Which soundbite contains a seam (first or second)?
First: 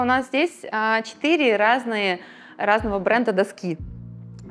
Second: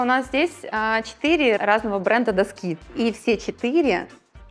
second